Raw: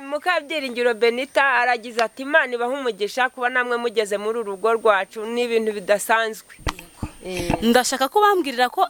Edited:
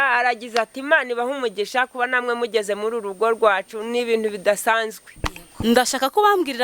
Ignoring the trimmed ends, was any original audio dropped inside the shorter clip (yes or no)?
yes